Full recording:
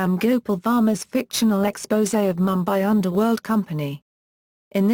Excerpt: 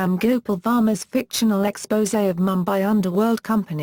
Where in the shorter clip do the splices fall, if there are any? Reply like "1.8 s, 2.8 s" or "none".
none